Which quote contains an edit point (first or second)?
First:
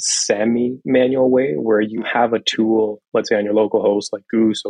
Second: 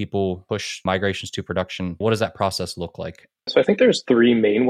second